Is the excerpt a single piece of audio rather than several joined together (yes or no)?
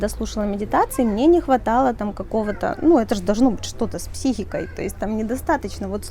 yes